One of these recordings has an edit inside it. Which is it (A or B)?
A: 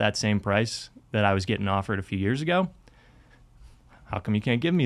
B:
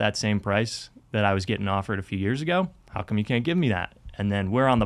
B